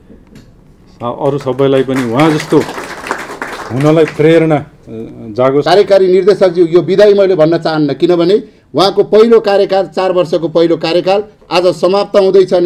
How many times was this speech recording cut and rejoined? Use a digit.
1